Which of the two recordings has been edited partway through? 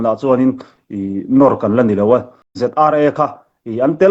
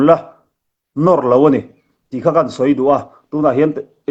first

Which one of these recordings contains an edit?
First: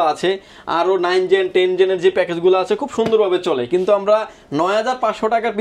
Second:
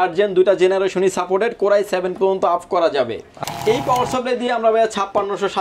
second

